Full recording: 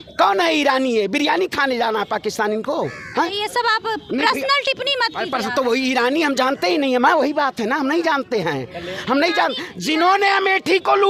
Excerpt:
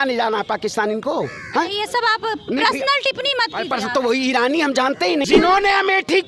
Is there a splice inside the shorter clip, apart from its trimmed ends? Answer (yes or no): yes